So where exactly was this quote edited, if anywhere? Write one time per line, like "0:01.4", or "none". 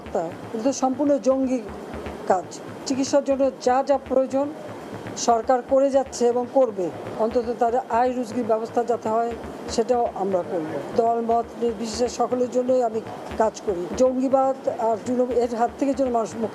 0:02.7
0:07.0
0:10.9
0:13.9